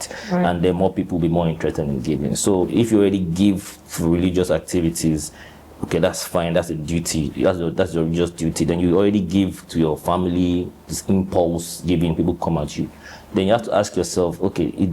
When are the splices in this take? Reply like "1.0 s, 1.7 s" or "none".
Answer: 2.7 s

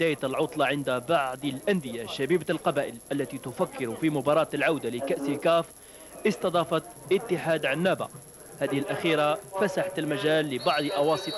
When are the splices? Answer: 3.5 s

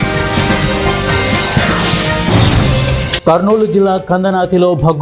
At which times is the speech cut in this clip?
3.0 s

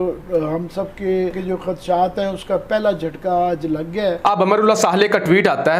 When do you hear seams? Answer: 1.4 s, 4.2 s

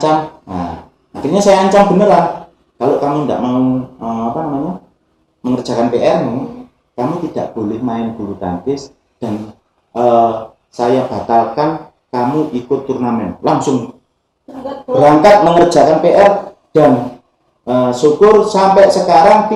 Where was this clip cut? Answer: none

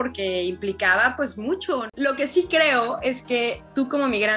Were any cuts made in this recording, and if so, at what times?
1.9 s

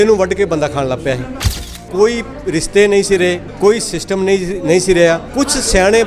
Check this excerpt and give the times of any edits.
1.8 s, 3.5 s, 5.3 s

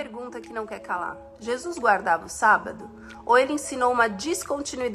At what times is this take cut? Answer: none

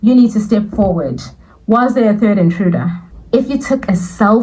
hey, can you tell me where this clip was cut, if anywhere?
3.0 s

